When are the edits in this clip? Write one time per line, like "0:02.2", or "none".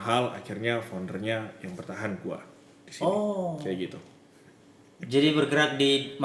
none

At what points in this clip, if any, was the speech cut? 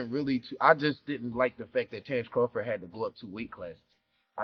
none

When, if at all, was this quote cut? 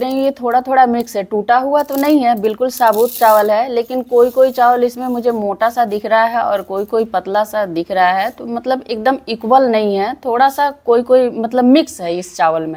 none

